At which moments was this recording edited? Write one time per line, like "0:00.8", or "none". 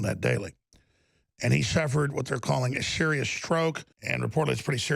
0:03.9